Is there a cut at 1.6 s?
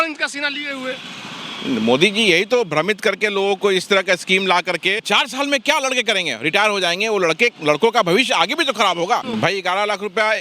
no; 2 cuts; at 5.0 s, 9.2 s

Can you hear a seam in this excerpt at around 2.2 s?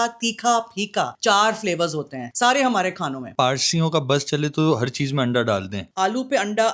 yes; 4 cuts; at 1.1 s, 2.2 s, 3.3 s, 5.8 s

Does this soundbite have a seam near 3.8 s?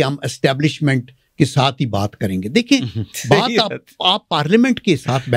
no; 0 cuts

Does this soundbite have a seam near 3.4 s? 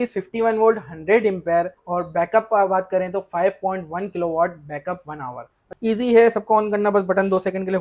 no; 2 cuts; at 1.8 s, 5.6 s

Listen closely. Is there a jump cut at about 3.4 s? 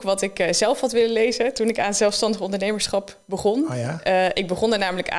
no; 0 cuts

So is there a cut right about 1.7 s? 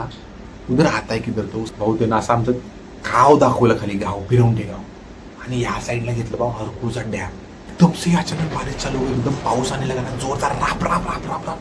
yes; 2 cuts; at 1.7 s, 7.7 s

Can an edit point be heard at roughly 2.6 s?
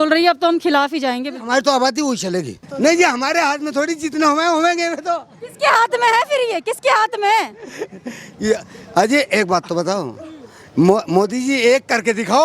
yes; 1 cut; at 2.6 s

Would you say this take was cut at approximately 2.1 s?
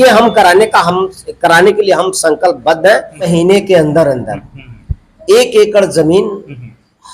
no; 1 cut; at 3.3 s

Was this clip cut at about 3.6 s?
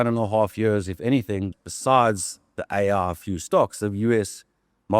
no; 1 cut; at 1.5 s

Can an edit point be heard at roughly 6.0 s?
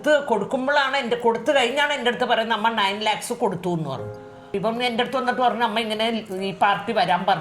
no; 1 cut; at 4.4 s

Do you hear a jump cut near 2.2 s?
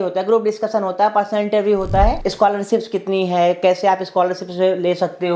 yes; 1 cut; at 2.2 s

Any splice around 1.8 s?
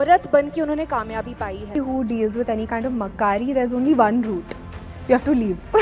yes; 1 cut; at 1.8 s

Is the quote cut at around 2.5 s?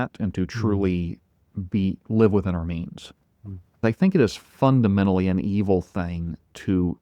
no; 1 cut; at 3.8 s

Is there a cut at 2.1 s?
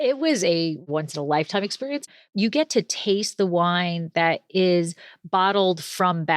yes; 2 cuts; at 0.9 s, 2.1 s

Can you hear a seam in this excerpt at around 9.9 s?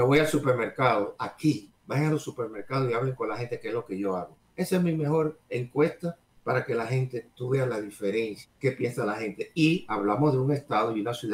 no; 4 cuts; at 1.8 s, 4.4 s, 6.3 s, 8.4 s

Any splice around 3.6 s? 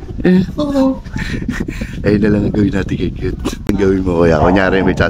yes; 1 cut; at 3.6 s

